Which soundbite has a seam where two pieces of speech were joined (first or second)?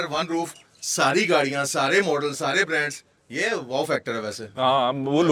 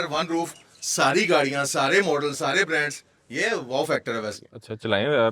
second